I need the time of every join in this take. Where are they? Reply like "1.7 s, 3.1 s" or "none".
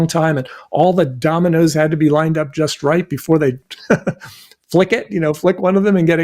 none